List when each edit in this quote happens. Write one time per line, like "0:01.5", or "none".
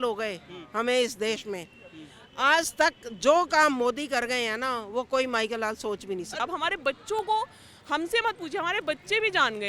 0:06.3